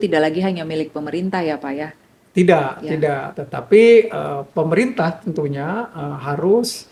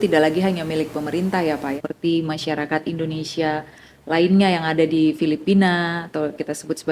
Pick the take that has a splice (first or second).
second